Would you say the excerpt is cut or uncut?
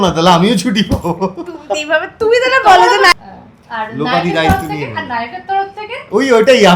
cut